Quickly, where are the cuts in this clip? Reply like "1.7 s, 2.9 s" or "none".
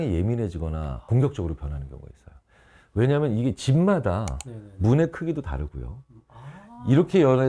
none